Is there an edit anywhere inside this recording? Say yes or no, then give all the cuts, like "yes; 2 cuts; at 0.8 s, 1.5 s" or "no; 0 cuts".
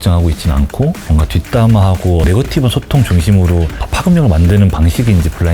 yes; 2 cuts; at 1.0 s, 2.2 s